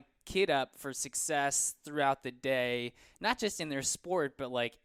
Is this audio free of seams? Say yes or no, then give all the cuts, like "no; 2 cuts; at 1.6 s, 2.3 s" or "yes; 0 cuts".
yes; 0 cuts